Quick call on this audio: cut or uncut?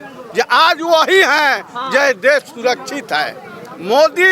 uncut